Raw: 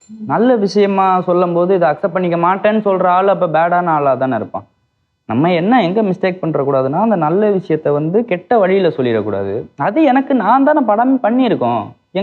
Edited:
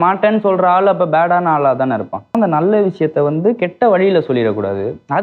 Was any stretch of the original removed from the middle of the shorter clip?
yes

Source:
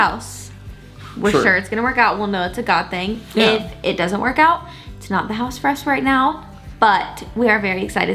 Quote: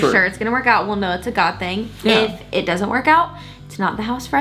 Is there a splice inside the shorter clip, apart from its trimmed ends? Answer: no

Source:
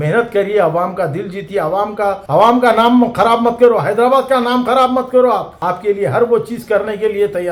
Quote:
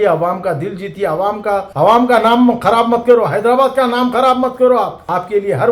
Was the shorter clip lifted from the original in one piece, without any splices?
yes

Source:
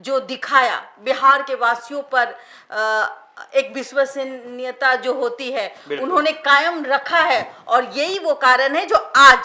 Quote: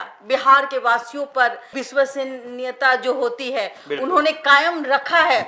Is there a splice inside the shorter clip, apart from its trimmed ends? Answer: yes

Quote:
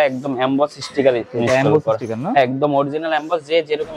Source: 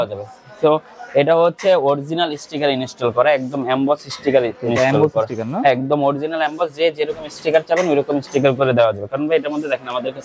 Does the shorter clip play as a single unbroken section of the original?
yes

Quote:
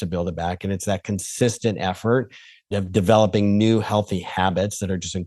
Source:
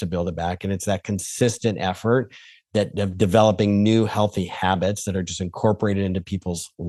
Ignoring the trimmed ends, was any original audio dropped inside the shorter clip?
yes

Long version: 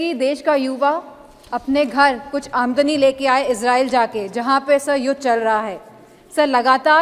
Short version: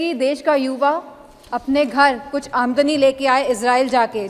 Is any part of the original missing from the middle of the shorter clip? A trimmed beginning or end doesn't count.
no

